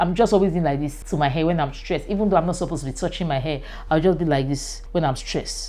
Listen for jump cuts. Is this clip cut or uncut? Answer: cut